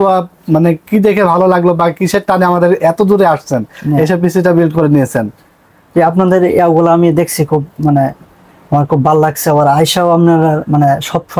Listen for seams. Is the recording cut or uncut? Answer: uncut